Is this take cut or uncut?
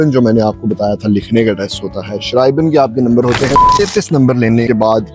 cut